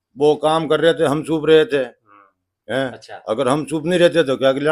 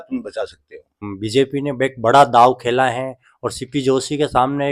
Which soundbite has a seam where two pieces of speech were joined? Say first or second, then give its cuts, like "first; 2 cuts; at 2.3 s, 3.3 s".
second; 1 cut; at 1.0 s